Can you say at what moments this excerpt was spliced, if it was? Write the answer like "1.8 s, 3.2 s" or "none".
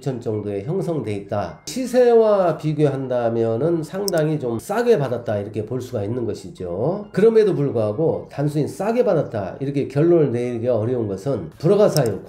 1.7 s, 4.1 s